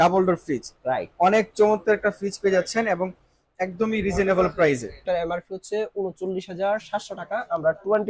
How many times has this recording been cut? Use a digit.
1